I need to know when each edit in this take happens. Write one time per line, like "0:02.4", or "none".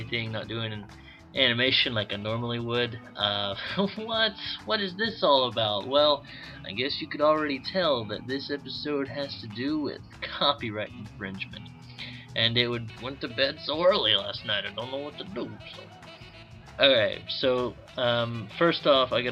none